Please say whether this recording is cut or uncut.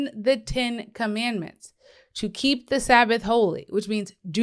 uncut